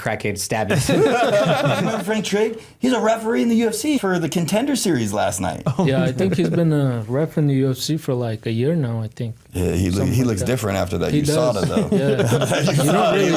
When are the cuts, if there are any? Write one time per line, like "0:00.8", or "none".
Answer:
0:02.0
0:04.0